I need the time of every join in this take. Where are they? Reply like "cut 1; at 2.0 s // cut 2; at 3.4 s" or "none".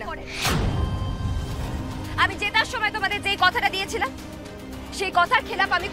none